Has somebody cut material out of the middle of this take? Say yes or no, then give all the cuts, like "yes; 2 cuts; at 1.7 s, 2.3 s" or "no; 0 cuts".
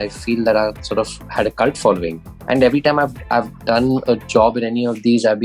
yes; 2 cuts; at 1.2 s, 2.3 s